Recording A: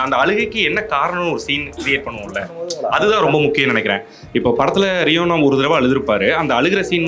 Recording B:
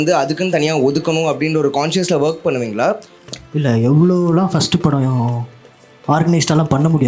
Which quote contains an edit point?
B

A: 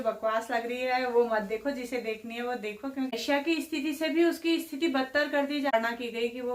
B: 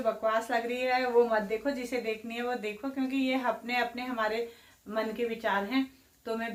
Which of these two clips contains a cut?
A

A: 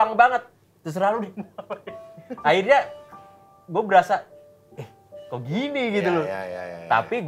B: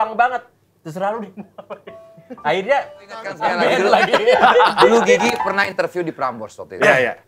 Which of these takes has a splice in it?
B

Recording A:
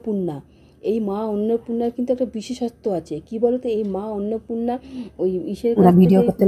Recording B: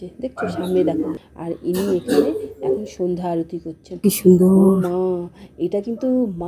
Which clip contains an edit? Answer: B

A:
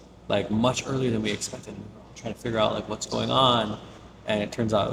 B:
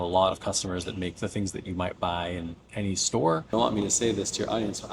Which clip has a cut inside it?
B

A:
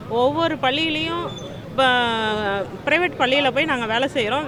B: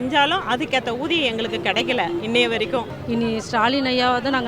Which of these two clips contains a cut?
B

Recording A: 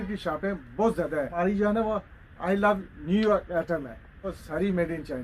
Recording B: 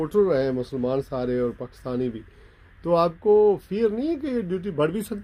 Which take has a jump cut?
A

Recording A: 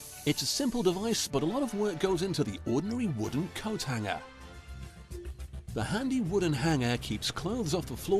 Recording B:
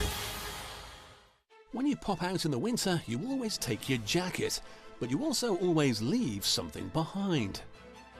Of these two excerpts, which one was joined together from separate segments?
B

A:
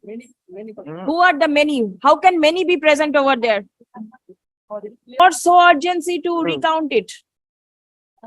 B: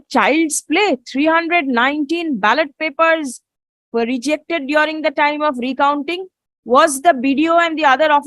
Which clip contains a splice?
A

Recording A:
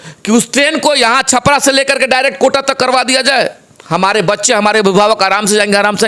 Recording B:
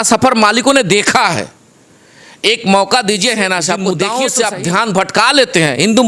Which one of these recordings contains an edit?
B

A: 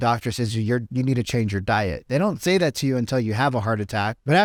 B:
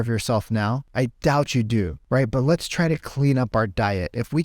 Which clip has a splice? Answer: B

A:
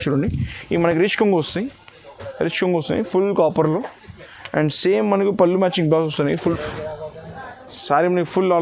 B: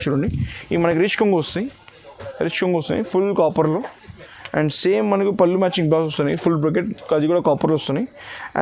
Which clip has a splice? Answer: A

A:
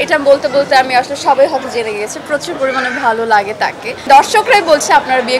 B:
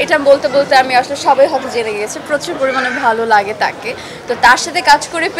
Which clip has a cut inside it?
A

